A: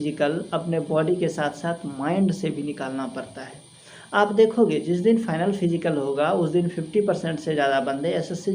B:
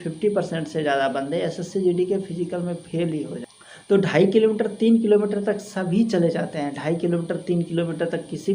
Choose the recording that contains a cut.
B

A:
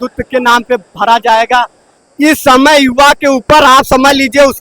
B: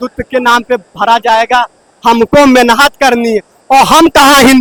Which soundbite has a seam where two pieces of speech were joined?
A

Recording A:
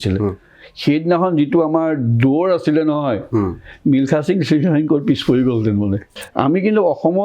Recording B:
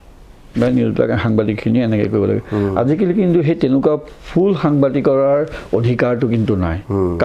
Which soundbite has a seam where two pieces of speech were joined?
A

